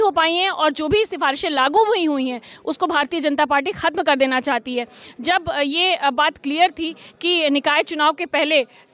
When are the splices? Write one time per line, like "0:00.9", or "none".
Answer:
none